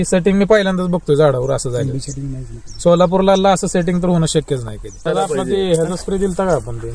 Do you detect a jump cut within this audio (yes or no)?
yes